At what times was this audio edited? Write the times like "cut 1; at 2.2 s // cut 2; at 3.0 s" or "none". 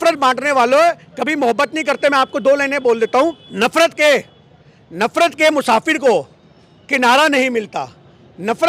cut 1; at 3.4 s